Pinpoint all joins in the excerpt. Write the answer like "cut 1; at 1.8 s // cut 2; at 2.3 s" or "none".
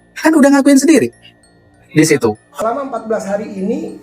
cut 1; at 2.5 s

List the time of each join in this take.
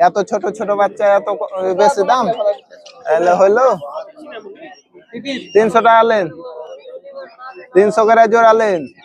none

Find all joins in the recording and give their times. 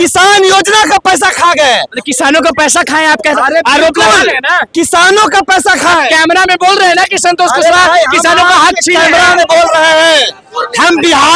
none

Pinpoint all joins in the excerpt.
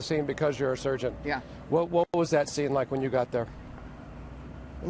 cut 1; at 1.4 s

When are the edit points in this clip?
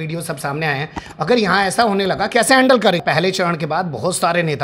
cut 1; at 3.0 s

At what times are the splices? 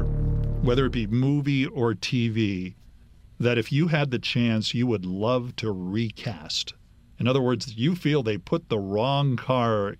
none

